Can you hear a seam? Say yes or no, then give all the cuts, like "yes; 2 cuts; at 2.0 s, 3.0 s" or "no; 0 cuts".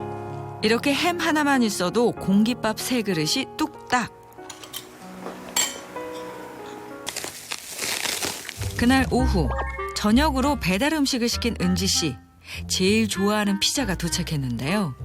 yes; 1 cut; at 7.0 s